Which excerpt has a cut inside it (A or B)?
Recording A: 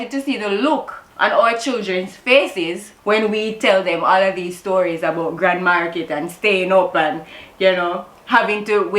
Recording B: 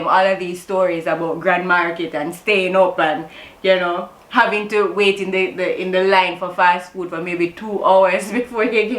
A